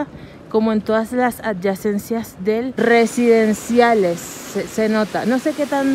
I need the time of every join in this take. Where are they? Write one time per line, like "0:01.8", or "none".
0:02.7